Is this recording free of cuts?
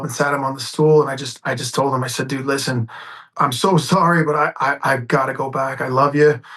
no; 1 cut; at 3.3 s

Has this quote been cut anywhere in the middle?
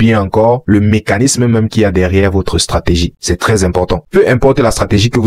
yes; 1 cut; at 3.2 s

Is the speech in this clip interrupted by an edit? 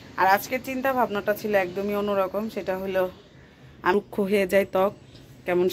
yes; 1 cut; at 3.9 s

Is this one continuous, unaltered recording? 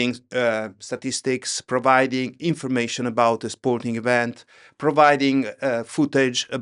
yes; 0 cuts

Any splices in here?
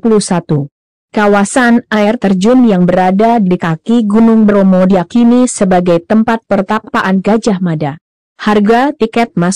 no; 0 cuts

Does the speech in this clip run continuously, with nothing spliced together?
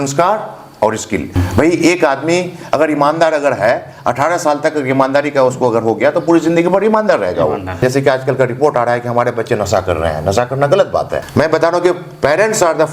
no; 3 cuts; at 1.4 s, 7.8 s, 11.2 s

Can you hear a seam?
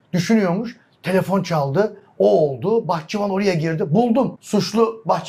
yes; 1 cut; at 4.4 s

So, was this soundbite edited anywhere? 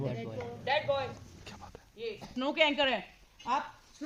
no; 0 cuts

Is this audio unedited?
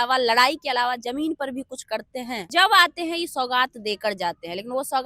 no; 1 cut; at 2.5 s

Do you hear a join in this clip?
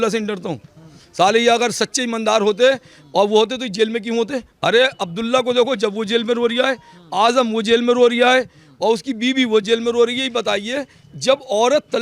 no; 0 cuts

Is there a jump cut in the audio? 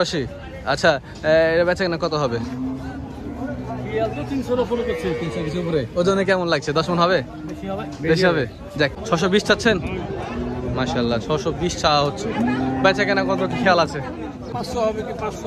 yes; 2 cuts; at 9.0 s, 14.5 s

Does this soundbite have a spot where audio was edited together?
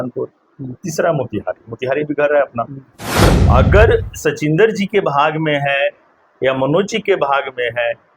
yes; 1 cut; at 3.3 s

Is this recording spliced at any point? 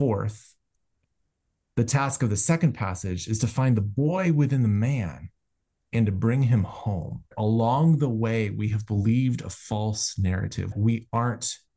yes; 2 cuts; at 7.3 s, 10.7 s

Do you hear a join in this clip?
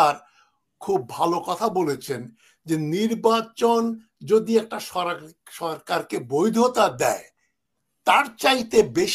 no; 0 cuts

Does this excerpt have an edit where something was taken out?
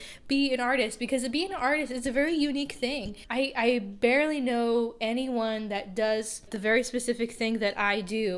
yes; 2 cuts; at 3.2 s, 6.5 s

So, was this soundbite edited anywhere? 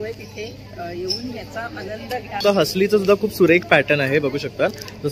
yes; 1 cut; at 2.4 s

